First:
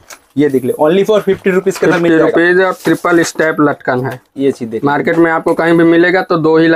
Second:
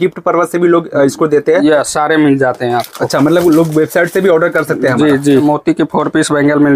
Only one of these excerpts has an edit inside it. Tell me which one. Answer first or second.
second